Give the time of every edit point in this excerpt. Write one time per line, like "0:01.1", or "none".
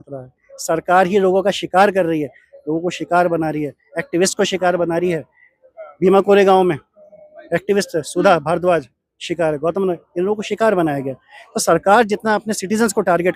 none